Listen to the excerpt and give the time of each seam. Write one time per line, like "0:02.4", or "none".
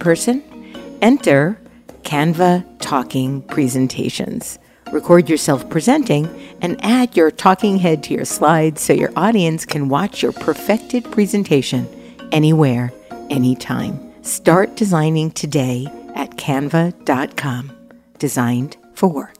none